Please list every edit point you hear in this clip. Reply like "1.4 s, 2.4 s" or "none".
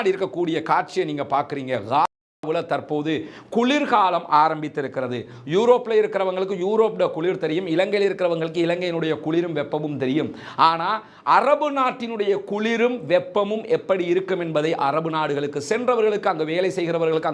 none